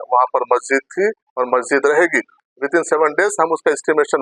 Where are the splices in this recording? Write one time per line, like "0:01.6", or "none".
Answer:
0:02.4